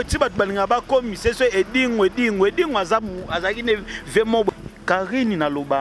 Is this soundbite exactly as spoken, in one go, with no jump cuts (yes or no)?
no